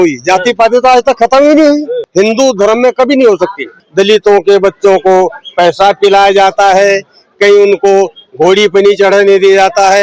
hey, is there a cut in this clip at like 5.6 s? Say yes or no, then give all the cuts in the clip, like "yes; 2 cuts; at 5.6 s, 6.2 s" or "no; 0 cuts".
no; 2 cuts; at 2.0 s, 3.8 s